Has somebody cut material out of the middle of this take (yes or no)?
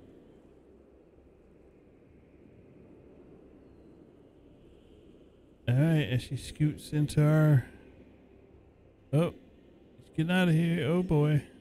no